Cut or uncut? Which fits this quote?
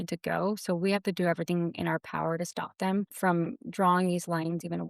cut